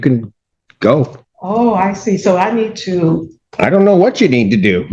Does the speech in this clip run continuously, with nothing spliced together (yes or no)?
no